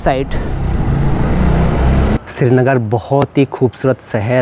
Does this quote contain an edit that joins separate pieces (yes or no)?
yes